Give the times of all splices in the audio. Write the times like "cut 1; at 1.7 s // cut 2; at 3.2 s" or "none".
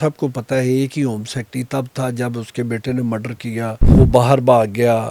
cut 1; at 3.8 s